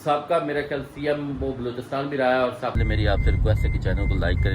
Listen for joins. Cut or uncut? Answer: cut